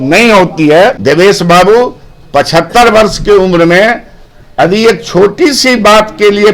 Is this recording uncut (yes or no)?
no